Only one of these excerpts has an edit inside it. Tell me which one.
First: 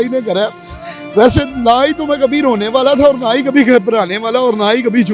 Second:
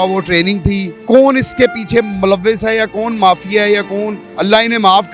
second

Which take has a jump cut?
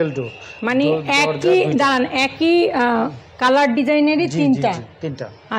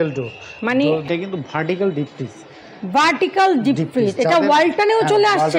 second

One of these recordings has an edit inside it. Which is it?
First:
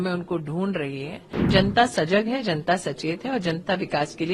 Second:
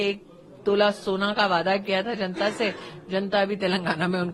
first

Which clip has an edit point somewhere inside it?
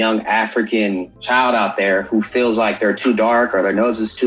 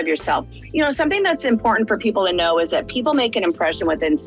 first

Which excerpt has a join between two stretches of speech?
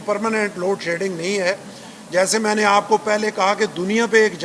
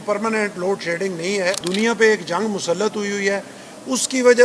second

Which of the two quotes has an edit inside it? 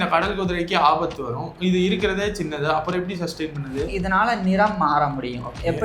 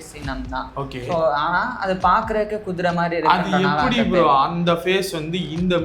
first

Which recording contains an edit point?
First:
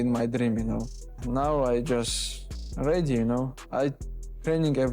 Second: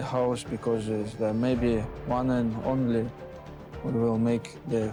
first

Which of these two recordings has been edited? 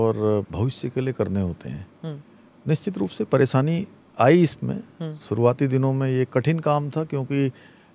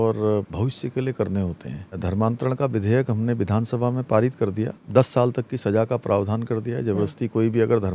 second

